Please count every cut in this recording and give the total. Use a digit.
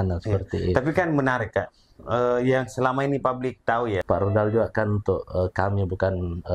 1